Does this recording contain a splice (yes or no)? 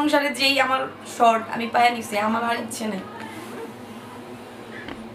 no